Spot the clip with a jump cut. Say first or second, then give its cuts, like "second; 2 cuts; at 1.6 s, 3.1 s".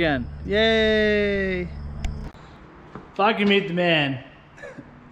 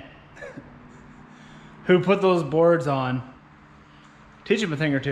first; 1 cut; at 2.2 s